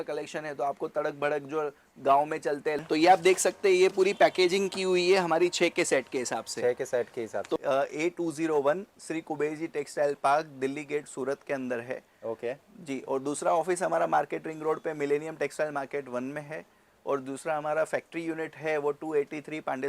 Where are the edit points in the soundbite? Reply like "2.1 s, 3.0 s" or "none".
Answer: 2.8 s, 7.6 s